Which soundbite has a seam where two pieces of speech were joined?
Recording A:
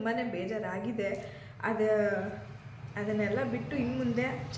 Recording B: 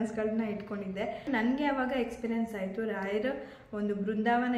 B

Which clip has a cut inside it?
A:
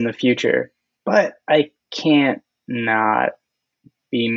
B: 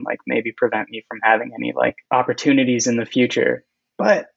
B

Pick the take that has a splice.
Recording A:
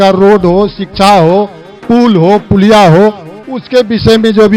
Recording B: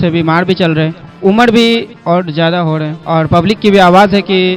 B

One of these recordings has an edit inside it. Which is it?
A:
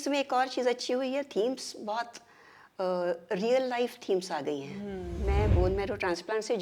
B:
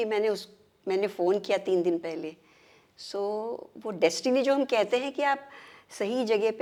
A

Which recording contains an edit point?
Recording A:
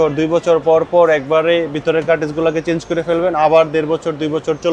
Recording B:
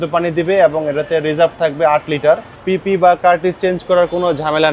B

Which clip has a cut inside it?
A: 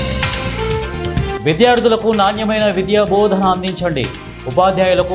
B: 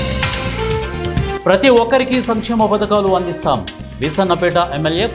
B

